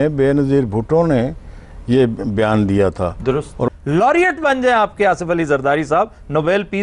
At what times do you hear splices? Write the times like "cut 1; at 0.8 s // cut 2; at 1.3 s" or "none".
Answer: cut 1; at 3.7 s